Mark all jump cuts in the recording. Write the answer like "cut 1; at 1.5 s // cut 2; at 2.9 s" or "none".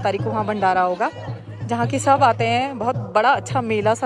none